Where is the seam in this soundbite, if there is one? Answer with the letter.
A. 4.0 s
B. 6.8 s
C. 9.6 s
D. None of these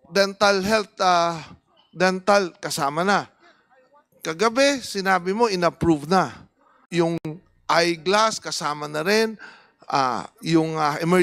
B